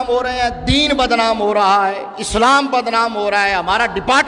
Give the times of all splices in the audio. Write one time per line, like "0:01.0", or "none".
none